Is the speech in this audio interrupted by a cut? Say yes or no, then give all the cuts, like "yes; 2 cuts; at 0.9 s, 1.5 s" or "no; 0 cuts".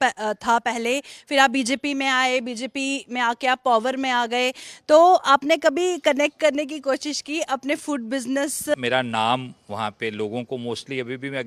yes; 1 cut; at 8.7 s